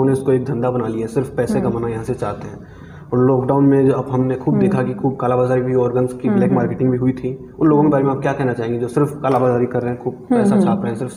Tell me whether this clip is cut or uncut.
uncut